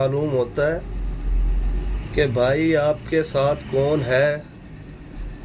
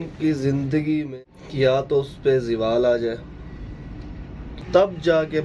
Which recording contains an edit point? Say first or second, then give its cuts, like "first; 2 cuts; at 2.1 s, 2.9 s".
second; 2 cuts; at 1.1 s, 4.7 s